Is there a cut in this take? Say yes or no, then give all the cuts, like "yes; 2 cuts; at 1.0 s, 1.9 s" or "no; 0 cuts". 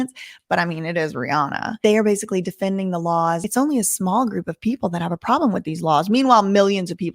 yes; 2 cuts; at 1.7 s, 3.4 s